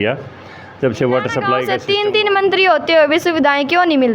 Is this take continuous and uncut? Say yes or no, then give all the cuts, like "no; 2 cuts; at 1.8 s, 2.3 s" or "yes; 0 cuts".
no; 1 cut; at 1.7 s